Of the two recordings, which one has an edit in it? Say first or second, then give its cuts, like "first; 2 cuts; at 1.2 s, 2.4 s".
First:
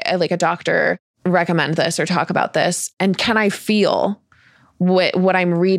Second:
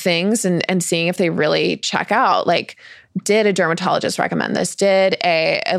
first; 2 cuts; at 1.1 s, 2.9 s